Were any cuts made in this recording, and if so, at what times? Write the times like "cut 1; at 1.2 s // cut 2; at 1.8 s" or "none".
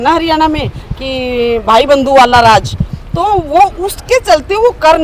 none